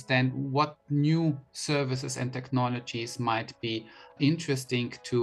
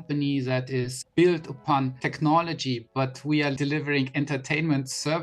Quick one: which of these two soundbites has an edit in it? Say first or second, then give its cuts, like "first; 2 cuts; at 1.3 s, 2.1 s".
second; 3 cuts; at 1.0 s, 2.0 s, 3.6 s